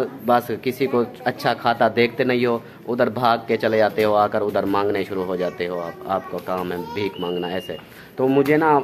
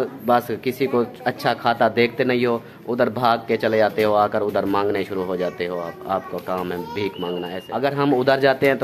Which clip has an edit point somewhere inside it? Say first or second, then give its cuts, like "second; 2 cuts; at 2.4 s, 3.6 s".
second; 1 cut; at 7.6 s